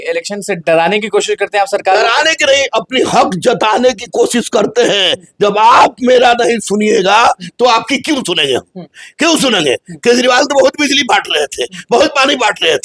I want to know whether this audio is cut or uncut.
uncut